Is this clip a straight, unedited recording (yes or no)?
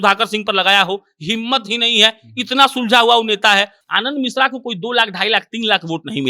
no